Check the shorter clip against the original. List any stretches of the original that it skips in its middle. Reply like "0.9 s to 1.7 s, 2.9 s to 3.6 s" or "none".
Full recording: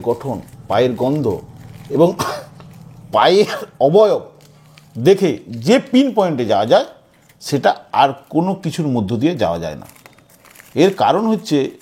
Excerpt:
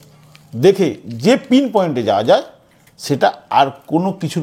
none